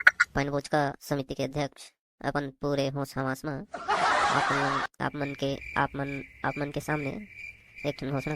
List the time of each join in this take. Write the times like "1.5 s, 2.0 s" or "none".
none